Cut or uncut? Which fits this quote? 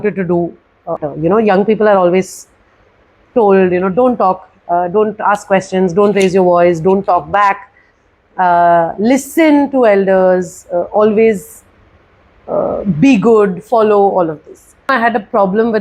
cut